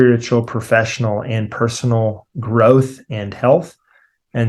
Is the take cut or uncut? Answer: uncut